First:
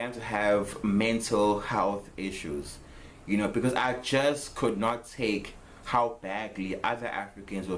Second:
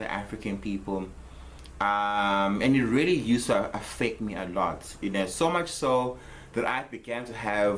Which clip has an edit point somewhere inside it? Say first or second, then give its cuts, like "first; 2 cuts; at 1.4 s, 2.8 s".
first; 2 cuts; at 5.3 s, 6.5 s